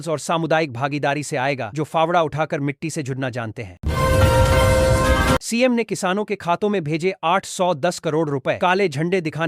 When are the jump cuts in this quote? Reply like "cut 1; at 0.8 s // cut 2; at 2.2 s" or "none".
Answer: cut 1; at 3.7 s // cut 2; at 5.4 s

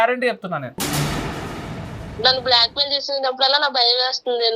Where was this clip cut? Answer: cut 1; at 2.2 s

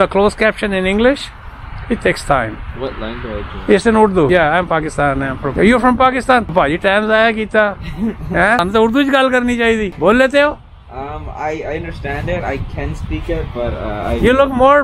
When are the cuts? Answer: cut 1; at 4.3 s // cut 2; at 5.5 s // cut 3; at 6.5 s // cut 4; at 8.6 s // cut 5; at 9.9 s

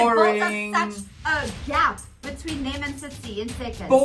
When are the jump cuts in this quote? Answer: cut 1; at 1.1 s

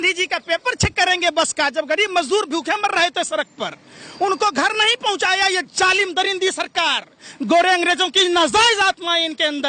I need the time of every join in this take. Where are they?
none

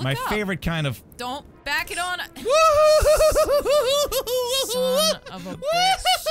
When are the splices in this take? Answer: cut 1; at 1.5 s

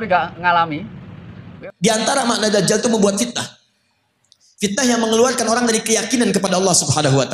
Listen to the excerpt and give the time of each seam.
cut 1; at 1.6 s

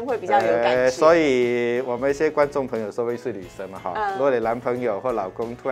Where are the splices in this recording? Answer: none

